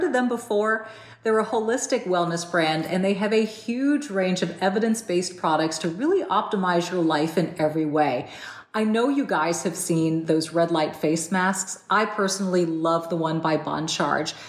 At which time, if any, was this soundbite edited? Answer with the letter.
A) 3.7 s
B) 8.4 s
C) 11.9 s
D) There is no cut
D